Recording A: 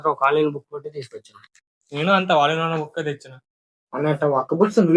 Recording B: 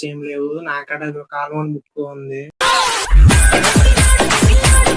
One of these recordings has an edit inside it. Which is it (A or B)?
B